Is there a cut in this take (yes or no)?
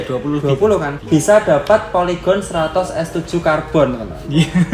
yes